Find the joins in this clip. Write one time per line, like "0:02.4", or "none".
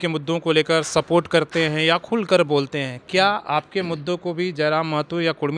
none

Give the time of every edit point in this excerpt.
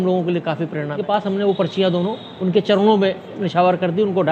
0:01.0

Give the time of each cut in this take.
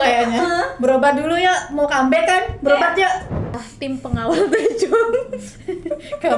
0:03.4

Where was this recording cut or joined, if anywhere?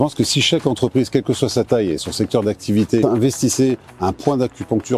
none

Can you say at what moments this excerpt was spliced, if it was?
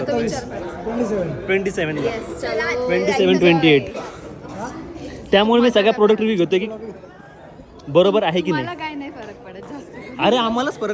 none

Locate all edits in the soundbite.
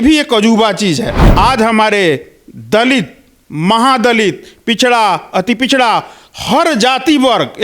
0:01.2

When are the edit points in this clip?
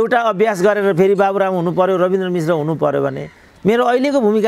none

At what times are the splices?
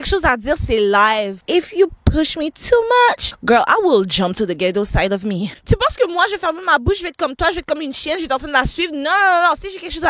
0:01.4
0:03.3
0:05.5

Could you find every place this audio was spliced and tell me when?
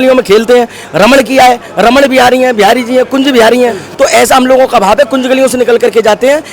0:03.8

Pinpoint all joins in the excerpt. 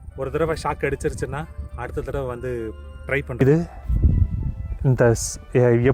0:03.4

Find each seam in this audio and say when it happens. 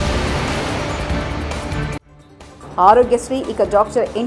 0:02.2

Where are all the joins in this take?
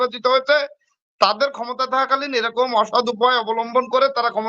none

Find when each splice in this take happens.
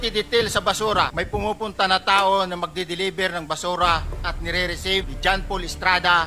0:01.2
0:05.1

